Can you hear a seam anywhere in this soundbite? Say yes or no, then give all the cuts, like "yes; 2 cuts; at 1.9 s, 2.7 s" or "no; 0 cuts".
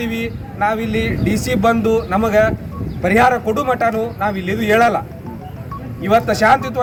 no; 0 cuts